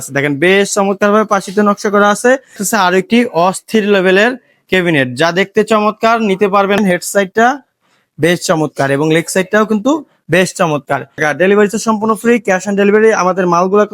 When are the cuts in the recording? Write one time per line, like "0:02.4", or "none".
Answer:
0:02.6
0:06.8
0:11.2